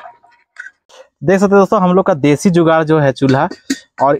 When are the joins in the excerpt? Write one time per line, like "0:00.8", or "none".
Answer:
0:01.1